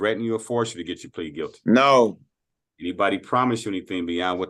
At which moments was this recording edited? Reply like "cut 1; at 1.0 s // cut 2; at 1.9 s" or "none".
none